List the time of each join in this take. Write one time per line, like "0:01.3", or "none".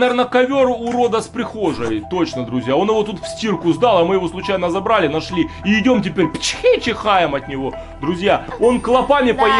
none